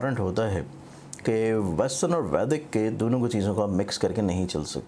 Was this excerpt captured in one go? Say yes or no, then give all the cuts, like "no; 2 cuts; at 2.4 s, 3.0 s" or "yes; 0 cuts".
yes; 0 cuts